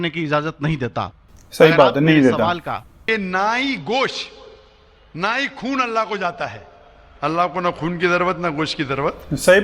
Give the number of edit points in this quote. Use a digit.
1